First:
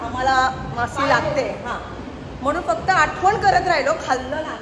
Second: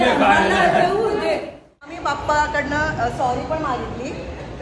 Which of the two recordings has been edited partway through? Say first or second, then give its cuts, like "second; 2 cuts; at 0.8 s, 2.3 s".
second; 1 cut; at 2.0 s